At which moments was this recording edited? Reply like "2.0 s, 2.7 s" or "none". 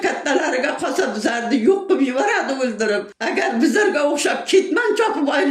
3.1 s